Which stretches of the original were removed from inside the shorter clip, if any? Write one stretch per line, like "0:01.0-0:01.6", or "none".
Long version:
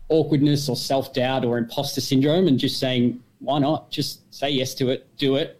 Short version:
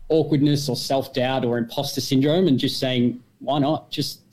none

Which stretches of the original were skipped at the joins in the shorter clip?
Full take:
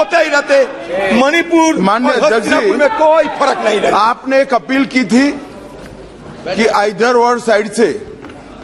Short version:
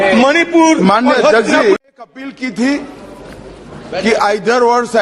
0:02.8-0:04.3

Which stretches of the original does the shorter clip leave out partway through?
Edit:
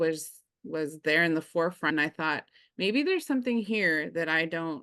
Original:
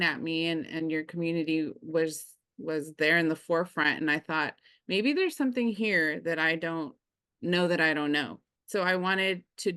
0:03.8-0:04.0

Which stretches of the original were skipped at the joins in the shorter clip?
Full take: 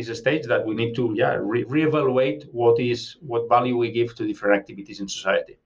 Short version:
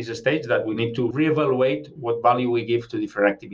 0:01.1-0:01.7
0:02.5-0:03.2

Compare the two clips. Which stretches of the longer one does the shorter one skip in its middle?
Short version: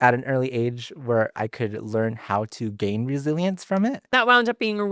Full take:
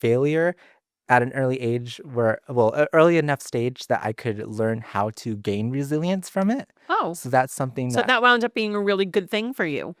0:02.5-0:04.0
0:06.8-0:08.1

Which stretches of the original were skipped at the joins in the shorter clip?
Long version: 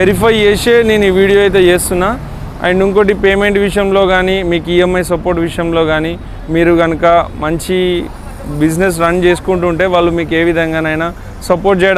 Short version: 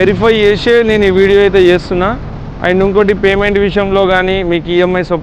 none

